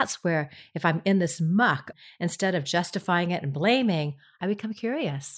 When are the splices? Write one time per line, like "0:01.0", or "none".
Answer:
0:02.0
0:04.4